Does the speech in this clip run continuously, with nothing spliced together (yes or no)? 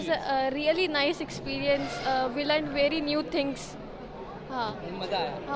yes